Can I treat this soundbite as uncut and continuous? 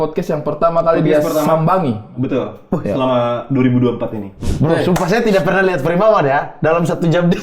no; 1 cut; at 4.4 s

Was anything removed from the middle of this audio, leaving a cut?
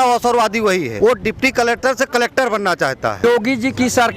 yes; 2 cuts; at 0.9 s, 3.2 s

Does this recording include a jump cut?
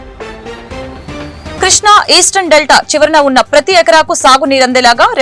yes; 1 cut; at 1.6 s

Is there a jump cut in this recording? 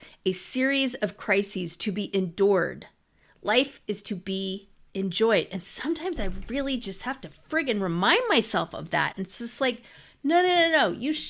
no; 0 cuts

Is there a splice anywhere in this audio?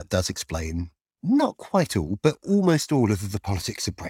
no; 0 cuts

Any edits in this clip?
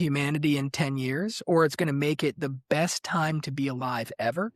no; 0 cuts

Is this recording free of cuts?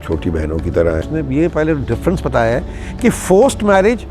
no; 1 cut; at 1.0 s

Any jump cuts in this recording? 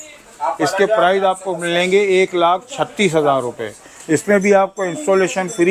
no; 0 cuts

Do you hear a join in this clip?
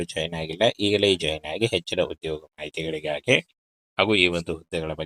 no; 0 cuts

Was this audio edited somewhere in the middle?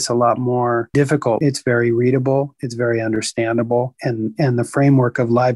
yes; 1 cut; at 1.4 s

